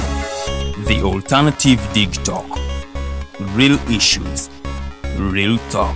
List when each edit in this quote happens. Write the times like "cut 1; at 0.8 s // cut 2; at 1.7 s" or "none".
none